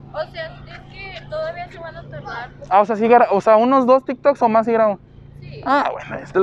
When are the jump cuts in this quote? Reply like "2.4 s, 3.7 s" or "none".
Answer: none

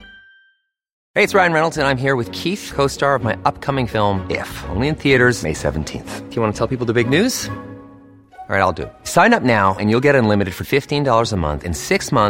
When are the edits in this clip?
1.0 s

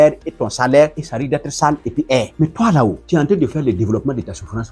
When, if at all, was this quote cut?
1.0 s, 2.3 s, 3.0 s

